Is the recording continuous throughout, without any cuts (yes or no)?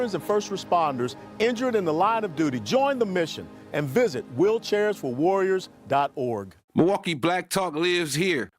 no